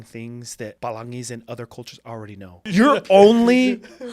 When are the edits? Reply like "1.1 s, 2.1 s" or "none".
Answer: 0.8 s, 2.6 s